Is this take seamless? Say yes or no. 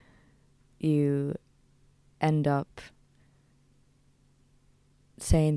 yes